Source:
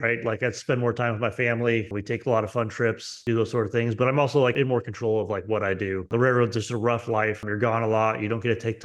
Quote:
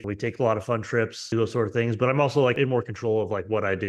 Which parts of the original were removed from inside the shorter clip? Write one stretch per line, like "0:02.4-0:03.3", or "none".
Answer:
0:03.1-0:03.2